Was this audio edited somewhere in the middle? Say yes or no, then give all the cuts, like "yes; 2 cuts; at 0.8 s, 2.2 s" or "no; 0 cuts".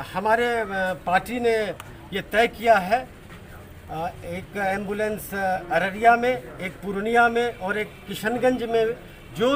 no; 0 cuts